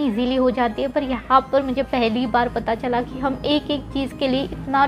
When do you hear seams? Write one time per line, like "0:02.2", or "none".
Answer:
none